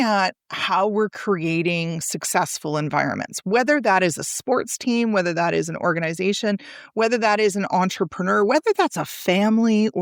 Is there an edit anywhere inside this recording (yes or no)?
no